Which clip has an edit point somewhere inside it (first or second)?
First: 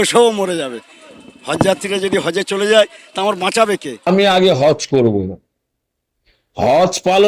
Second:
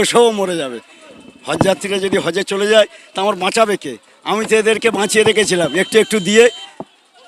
first